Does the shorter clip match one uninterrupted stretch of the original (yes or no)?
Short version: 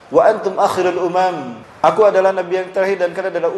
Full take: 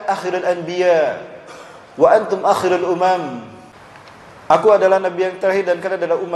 no